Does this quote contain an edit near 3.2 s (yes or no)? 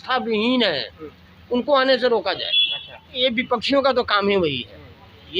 yes